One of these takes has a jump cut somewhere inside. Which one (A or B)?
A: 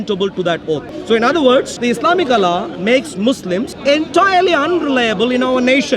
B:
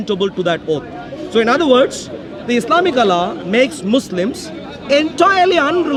A